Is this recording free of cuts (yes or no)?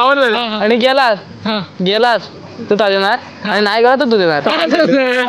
yes